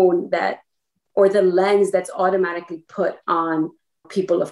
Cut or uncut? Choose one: uncut